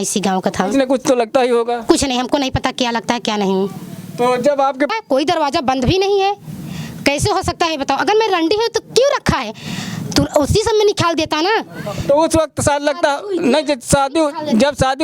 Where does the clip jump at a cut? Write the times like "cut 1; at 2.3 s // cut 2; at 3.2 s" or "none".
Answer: cut 1; at 4.9 s